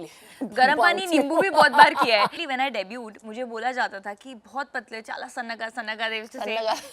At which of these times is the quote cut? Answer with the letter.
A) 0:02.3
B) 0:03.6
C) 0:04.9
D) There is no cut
A